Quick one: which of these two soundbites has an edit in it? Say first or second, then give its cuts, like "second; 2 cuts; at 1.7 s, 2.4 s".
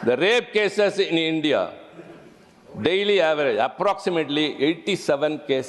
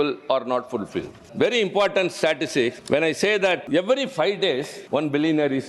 second; 4 cuts; at 1.2 s, 2.8 s, 3.6 s, 4.8 s